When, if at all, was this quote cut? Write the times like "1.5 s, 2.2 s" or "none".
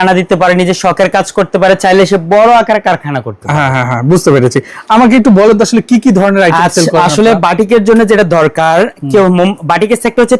none